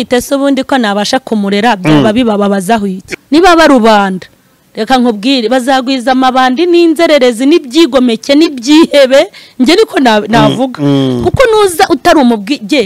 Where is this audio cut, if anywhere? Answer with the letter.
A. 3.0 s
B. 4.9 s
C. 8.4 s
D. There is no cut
A